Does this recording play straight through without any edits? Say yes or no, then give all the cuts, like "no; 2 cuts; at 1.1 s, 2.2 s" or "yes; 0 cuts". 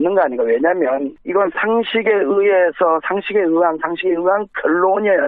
no; 1 cut; at 4.2 s